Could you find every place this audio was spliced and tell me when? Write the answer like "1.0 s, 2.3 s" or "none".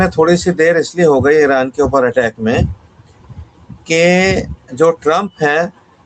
none